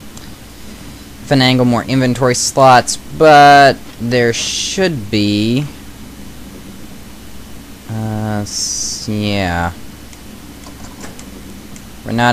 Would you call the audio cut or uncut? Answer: cut